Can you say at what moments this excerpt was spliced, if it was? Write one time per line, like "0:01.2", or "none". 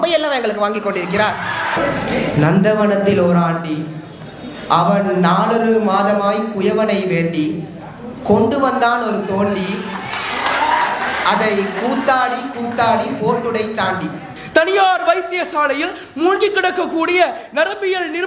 0:01.7
0:14.3